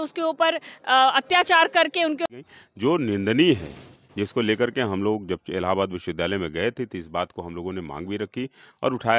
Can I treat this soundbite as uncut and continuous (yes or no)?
no